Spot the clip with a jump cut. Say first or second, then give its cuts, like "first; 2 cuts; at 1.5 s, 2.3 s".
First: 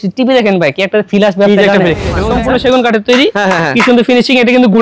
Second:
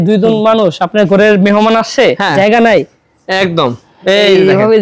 first; 1 cut; at 2.1 s